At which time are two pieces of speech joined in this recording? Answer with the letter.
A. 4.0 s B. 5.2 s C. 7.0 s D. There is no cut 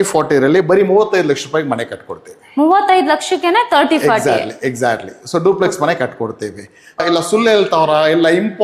C